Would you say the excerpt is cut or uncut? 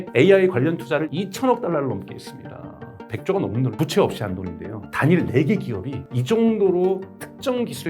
cut